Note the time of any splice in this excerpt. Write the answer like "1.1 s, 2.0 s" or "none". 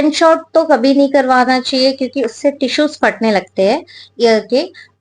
none